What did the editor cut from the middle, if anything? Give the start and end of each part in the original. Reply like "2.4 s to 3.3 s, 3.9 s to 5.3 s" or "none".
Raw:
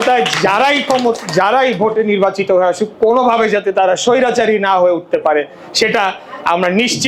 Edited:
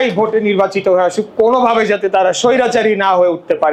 none